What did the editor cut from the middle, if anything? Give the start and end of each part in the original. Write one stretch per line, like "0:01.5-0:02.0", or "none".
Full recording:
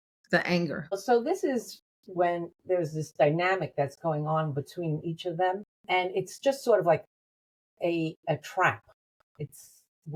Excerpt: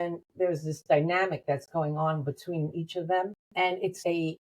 0:05.7-0:07.2